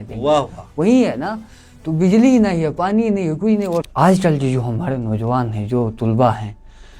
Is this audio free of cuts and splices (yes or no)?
no